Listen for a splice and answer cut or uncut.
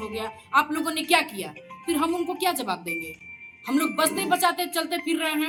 uncut